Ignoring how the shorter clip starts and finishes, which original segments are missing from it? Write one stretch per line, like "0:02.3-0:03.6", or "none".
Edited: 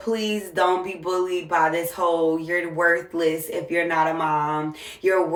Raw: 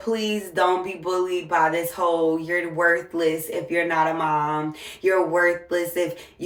none